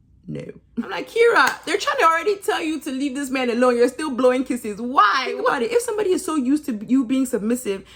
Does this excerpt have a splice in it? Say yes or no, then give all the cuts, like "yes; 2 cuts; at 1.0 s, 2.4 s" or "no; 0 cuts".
yes; 2 cuts; at 0.9 s, 5.5 s